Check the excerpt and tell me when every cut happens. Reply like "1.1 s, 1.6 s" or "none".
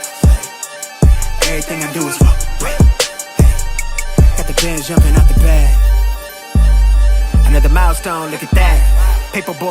1.4 s